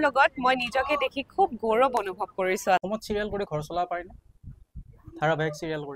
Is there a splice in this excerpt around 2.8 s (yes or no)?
yes